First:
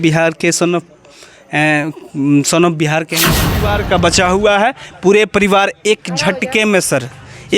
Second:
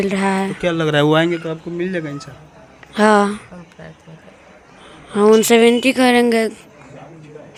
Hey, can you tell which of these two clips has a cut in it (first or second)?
first